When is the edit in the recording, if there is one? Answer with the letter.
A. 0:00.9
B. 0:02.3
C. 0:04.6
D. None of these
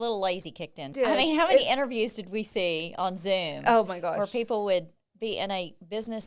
A